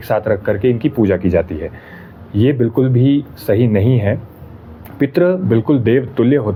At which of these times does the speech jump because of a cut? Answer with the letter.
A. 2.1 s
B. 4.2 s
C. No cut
C